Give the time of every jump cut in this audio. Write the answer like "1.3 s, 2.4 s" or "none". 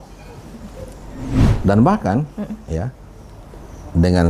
1.4 s